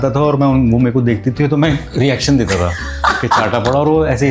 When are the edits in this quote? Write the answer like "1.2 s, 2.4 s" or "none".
none